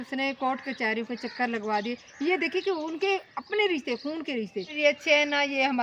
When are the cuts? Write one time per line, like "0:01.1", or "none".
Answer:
0:04.7